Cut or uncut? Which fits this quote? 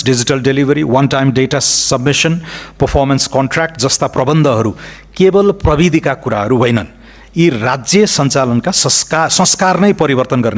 uncut